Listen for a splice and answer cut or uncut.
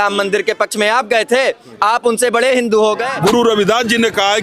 cut